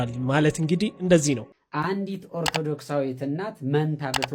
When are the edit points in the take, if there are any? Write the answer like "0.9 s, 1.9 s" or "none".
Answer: 1.5 s